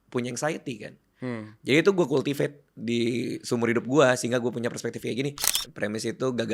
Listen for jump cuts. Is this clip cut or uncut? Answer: cut